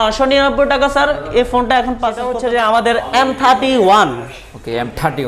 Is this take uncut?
no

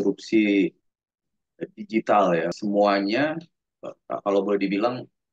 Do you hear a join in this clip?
yes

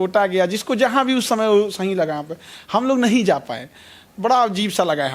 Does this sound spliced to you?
no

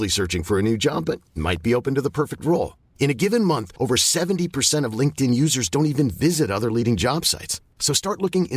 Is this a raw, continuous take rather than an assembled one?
yes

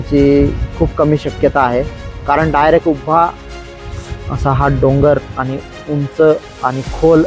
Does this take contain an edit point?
no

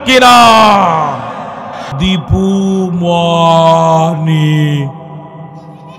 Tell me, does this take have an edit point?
yes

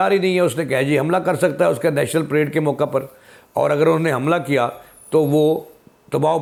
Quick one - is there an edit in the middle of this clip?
no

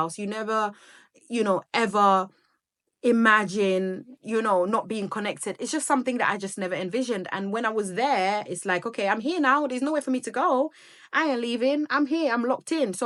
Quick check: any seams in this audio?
no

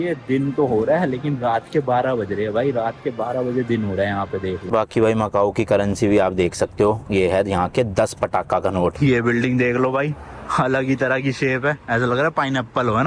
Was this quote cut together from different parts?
yes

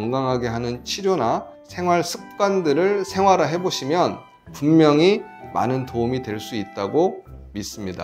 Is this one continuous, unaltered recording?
yes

